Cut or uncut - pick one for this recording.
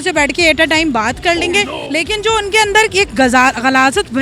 cut